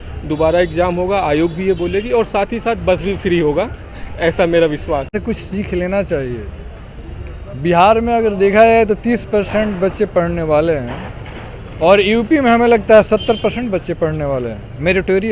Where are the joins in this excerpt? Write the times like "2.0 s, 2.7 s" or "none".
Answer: 5.1 s